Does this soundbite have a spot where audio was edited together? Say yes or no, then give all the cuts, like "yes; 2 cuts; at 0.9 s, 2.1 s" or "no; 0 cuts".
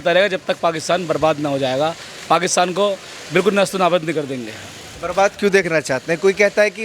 no; 0 cuts